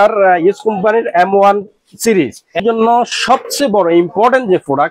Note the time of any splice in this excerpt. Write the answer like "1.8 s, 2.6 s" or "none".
2.6 s